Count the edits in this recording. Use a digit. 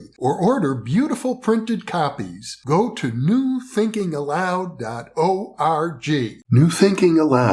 1